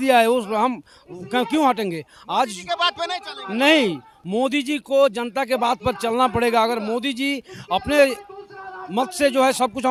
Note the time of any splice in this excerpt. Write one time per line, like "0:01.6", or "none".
none